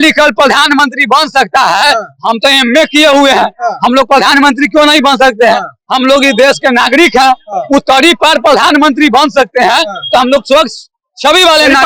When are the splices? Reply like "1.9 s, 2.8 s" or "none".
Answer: none